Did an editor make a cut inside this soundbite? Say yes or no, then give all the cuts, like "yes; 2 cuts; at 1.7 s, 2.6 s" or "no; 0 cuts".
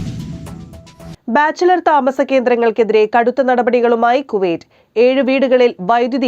yes; 1 cut; at 1.1 s